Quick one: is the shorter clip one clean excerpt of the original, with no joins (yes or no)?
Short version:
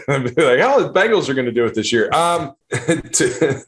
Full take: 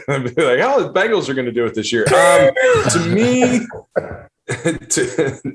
no